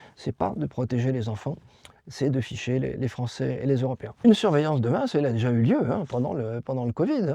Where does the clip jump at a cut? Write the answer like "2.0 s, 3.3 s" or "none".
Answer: 4.1 s